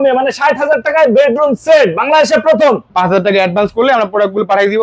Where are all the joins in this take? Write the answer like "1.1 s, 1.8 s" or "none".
2.8 s